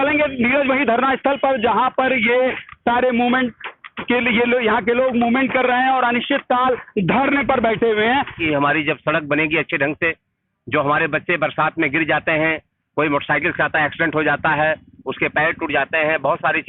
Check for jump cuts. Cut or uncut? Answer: cut